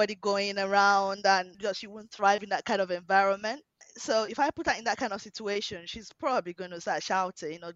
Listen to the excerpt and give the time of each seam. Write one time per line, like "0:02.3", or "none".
0:01.5
0:03.9

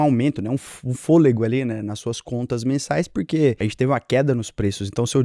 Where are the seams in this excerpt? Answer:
none

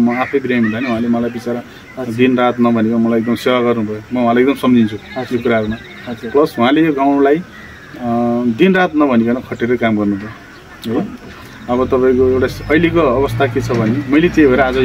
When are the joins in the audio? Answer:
none

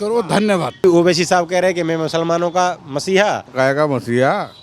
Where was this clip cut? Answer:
0:00.8
0:03.5

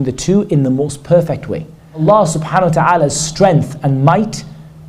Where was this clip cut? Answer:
0:02.0

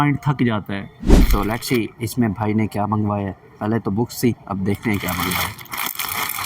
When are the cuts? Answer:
0:01.1

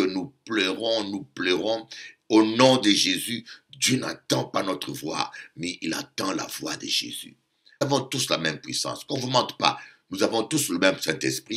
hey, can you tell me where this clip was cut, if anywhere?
0:07.8

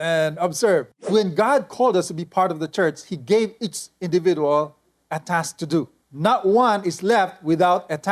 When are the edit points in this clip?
0:00.9
0:06.0

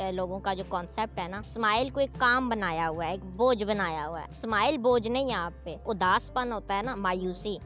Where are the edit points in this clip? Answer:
0:01.4
0:04.3
0:05.8

